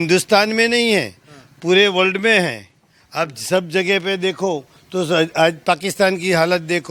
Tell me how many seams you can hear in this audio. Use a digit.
0